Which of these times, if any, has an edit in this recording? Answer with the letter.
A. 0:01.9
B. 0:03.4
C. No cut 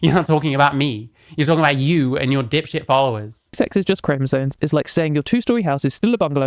B